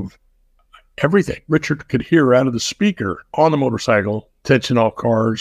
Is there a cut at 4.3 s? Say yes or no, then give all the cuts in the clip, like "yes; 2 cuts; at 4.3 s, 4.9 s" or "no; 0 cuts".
yes; 3 cuts; at 1.4 s, 3.1 s, 4.3 s